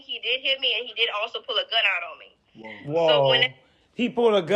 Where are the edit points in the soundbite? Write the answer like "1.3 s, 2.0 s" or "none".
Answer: none